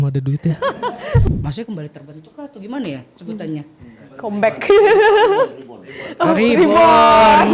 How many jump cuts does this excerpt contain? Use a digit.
1